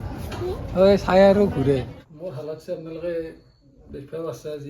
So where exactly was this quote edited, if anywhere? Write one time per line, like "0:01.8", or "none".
0:01.9